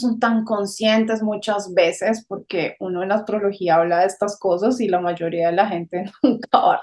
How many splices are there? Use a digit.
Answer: 0